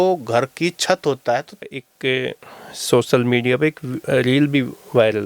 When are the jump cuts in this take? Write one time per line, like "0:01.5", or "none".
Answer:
0:01.6